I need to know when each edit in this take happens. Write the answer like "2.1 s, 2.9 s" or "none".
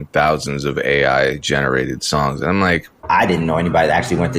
3.0 s